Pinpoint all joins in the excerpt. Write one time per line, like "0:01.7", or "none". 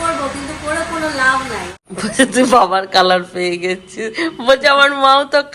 0:01.8